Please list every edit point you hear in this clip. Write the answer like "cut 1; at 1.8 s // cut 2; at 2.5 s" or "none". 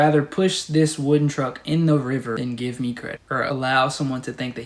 cut 1; at 2.4 s // cut 2; at 3.4 s